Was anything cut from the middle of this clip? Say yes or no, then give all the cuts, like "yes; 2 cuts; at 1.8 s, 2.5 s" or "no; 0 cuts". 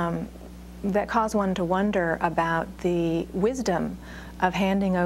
no; 0 cuts